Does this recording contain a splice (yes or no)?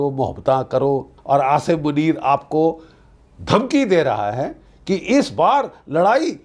yes